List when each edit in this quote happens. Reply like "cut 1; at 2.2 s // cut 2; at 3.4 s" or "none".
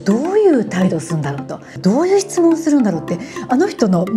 cut 1; at 1.8 s